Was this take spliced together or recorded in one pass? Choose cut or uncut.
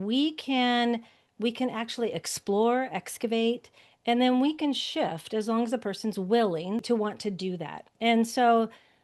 cut